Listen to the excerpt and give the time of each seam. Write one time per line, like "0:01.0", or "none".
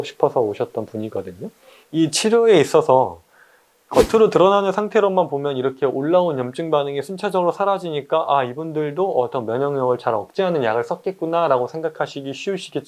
0:01.7